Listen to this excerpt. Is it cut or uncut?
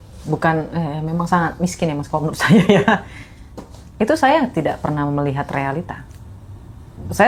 uncut